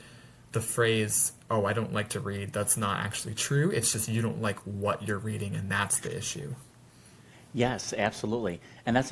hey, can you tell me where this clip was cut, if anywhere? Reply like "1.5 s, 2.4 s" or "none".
none